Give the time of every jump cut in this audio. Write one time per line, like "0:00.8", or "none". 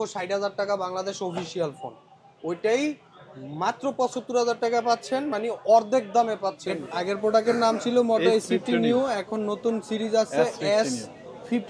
0:06.9